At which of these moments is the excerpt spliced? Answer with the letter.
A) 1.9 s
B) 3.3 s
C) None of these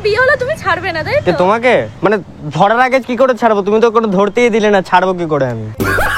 A